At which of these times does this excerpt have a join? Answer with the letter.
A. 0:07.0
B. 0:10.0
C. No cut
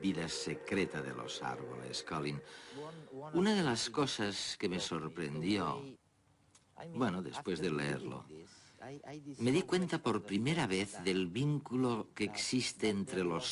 B